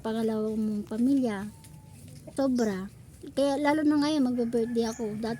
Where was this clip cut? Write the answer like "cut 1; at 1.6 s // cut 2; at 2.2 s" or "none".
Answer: cut 1; at 2.2 s